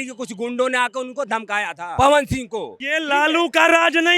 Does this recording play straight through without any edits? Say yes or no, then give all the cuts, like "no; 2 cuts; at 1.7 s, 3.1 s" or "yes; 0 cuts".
no; 2 cuts; at 1.9 s, 2.8 s